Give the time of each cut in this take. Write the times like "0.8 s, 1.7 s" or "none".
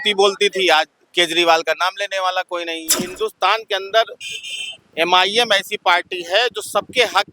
3.1 s